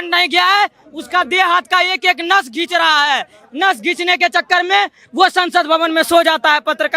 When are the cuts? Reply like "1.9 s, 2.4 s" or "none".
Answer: none